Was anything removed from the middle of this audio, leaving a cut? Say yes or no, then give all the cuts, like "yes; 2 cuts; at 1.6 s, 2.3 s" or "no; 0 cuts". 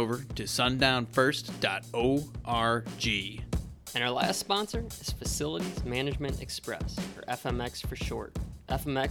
yes; 1 cut; at 3.3 s